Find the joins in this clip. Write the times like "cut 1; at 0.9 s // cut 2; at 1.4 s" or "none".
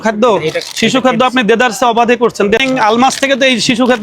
cut 1; at 2.6 s